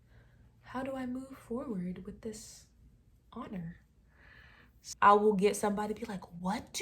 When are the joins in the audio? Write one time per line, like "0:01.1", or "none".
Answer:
0:04.8